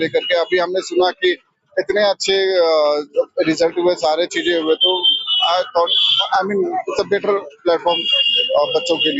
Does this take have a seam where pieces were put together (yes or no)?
no